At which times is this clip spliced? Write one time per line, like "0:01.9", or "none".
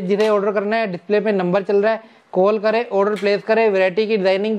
none